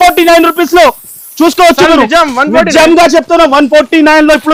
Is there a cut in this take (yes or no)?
no